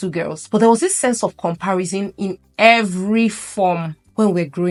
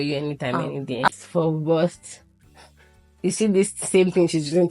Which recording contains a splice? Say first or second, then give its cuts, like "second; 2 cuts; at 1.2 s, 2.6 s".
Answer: second; 1 cut; at 1.1 s